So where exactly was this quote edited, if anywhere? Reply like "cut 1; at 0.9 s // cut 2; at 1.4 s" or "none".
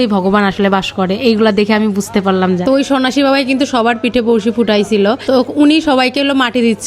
none